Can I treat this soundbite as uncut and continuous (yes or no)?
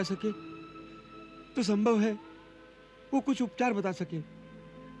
yes